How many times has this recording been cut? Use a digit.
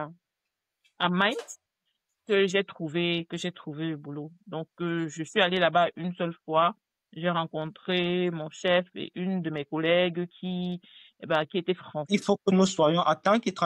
1